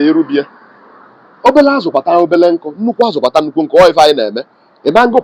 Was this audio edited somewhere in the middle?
no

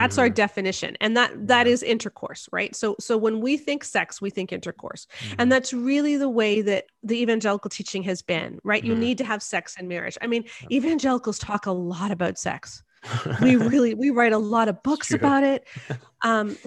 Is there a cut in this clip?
yes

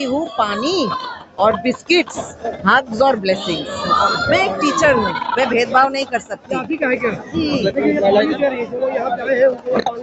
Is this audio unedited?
yes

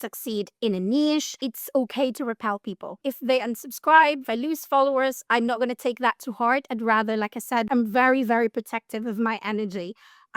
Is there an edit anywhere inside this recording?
yes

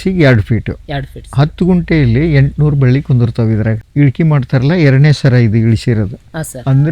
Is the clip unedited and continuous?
no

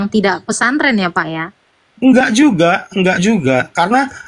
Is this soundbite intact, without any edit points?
yes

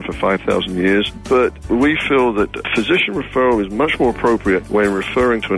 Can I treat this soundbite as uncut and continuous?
no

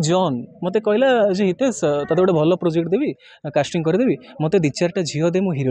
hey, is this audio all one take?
yes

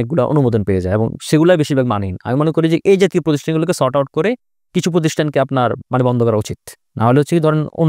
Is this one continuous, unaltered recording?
yes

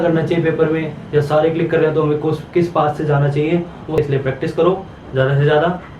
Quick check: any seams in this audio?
yes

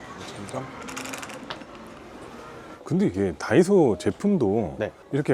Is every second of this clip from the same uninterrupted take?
no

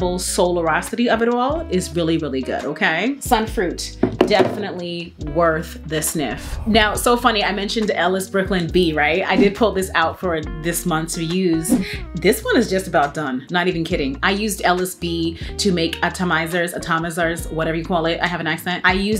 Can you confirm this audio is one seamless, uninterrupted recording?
yes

